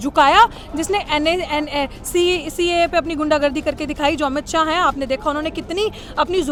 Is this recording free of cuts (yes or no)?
yes